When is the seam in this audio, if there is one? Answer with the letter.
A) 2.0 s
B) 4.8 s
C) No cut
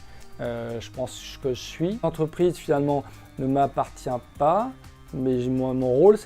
A